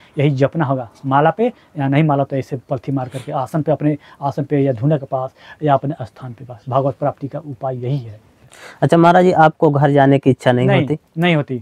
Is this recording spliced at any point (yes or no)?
yes